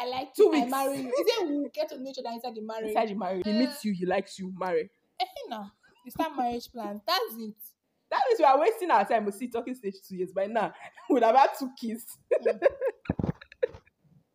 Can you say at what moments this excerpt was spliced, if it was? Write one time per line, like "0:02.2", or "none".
0:03.4